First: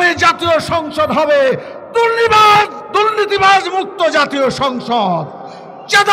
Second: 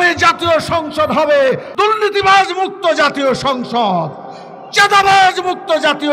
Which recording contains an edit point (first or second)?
second